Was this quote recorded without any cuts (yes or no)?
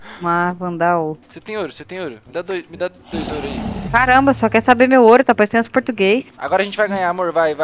no